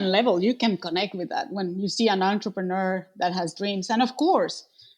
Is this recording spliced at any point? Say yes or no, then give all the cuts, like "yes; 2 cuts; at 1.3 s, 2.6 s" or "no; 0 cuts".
no; 0 cuts